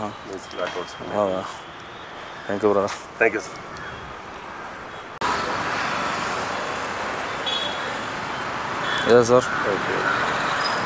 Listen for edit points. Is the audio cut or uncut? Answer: uncut